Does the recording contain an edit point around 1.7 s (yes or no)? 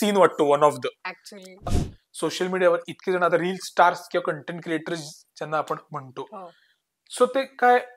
yes